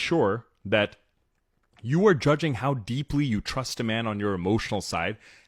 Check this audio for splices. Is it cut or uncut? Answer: uncut